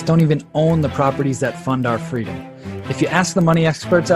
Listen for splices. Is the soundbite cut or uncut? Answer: uncut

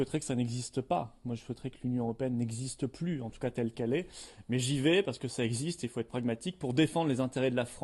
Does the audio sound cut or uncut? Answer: cut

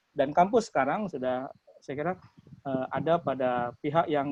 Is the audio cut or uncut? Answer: uncut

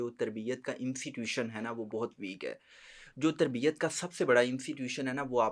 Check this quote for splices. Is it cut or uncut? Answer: uncut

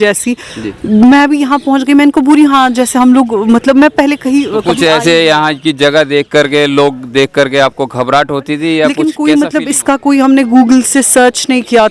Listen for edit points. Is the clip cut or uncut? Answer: cut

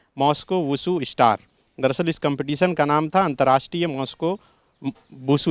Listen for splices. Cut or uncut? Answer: uncut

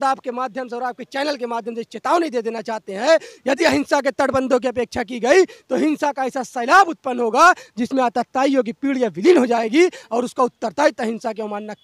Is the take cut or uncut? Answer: uncut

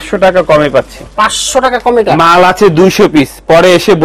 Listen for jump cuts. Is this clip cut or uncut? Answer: uncut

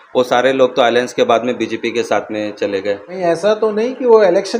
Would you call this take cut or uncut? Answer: cut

